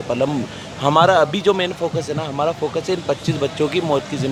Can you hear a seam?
no; 0 cuts

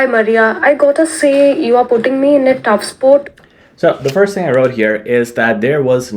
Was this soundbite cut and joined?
no; 0 cuts

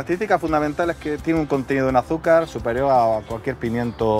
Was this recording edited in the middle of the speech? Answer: yes; 1 cut; at 1.2 s

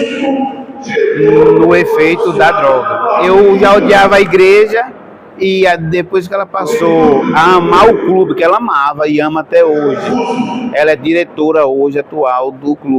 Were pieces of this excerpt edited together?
yes; 1 cut; at 3.2 s

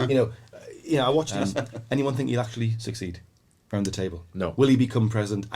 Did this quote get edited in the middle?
yes; 1 cut; at 1.3 s

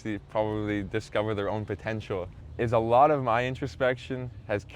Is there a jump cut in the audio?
yes; 1 cut; at 2.4 s

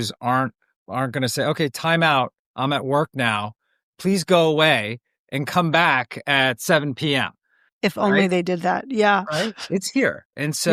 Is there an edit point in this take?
yes; 1 cut; at 7.7 s

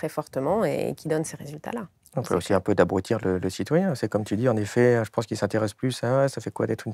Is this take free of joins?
yes; 0 cuts

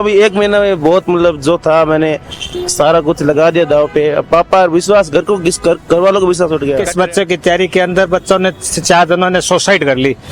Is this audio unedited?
no; 1 cut; at 6.9 s

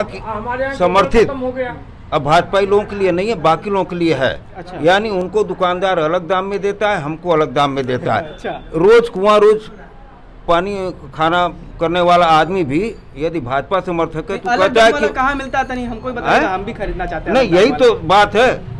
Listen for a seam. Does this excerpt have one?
no; 0 cuts

